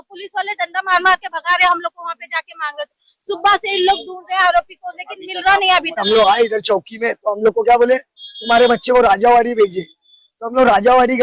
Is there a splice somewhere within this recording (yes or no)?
yes